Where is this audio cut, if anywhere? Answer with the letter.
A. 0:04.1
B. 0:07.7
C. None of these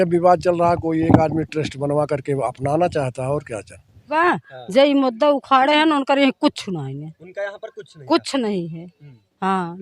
A